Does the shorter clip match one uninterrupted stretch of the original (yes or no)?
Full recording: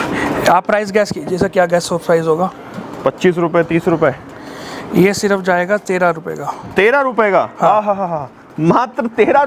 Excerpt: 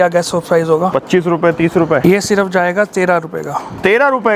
no